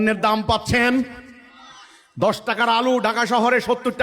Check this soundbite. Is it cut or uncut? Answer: uncut